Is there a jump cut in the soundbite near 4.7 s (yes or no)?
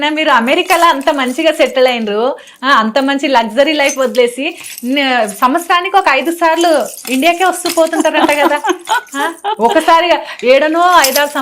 no